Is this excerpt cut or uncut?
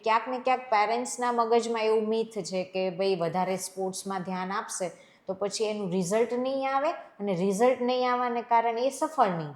uncut